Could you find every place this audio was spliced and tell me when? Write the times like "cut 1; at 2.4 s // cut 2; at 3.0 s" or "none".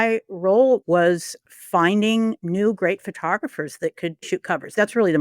cut 1; at 0.8 s // cut 2; at 2.4 s // cut 3; at 4.3 s